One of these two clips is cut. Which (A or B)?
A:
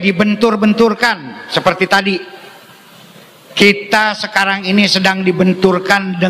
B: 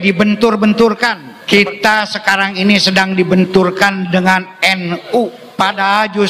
B